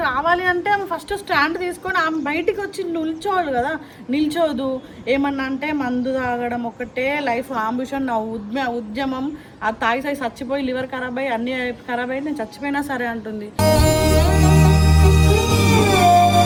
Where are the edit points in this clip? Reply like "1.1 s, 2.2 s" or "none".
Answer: none